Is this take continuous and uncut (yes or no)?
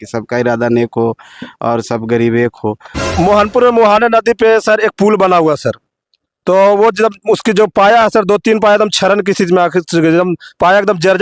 no